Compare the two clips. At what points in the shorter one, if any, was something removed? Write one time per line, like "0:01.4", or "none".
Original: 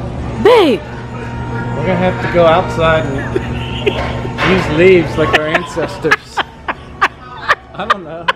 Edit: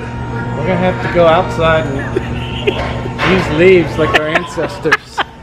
none